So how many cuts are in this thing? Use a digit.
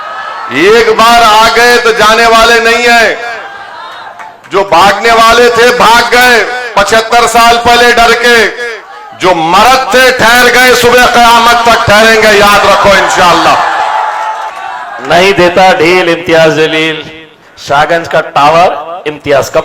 1